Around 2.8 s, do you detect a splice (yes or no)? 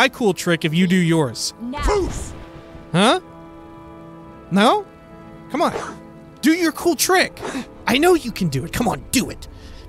no